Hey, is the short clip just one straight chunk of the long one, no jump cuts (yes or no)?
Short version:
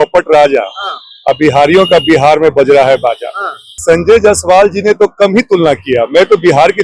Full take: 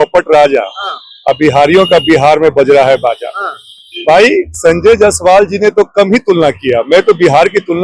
no